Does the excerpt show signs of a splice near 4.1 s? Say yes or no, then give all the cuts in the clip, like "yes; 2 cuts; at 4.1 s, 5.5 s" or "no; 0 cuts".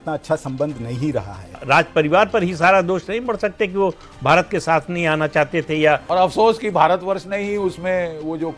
no; 2 cuts; at 1.6 s, 6.0 s